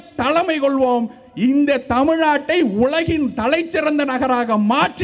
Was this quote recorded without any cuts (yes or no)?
yes